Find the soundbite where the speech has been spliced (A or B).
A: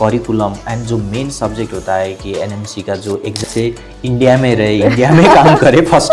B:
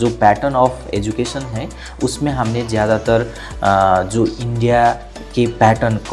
A